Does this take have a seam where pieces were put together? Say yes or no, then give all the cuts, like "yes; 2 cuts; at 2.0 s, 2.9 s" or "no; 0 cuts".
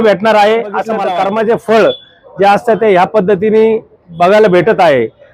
yes; 1 cut; at 0.9 s